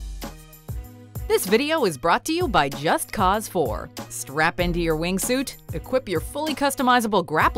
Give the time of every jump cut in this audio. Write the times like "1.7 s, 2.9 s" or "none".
1.1 s